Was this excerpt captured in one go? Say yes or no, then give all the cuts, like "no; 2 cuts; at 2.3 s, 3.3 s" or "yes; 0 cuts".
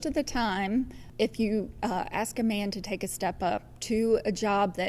no; 1 cut; at 1.0 s